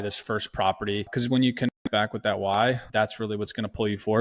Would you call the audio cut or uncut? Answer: cut